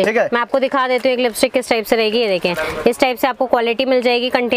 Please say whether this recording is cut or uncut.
uncut